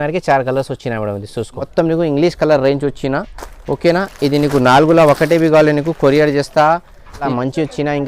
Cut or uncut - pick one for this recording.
cut